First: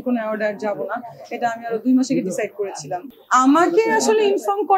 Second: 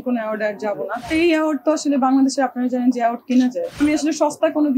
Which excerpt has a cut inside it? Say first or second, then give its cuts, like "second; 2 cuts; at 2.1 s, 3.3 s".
second; 2 cuts; at 1.1 s, 3.8 s